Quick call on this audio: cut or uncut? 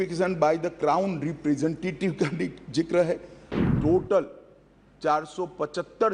cut